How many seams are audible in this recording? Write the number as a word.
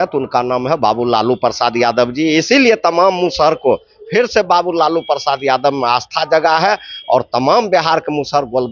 zero